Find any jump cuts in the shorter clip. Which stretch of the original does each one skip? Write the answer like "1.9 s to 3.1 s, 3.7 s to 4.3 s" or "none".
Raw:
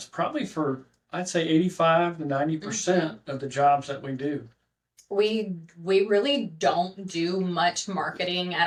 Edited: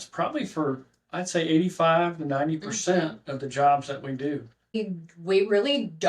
4.7 s to 5.3 s